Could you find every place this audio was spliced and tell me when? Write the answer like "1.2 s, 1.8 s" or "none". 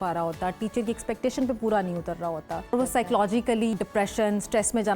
2.7 s, 3.7 s